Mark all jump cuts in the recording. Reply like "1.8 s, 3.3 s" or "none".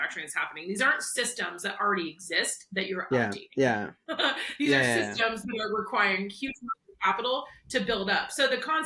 none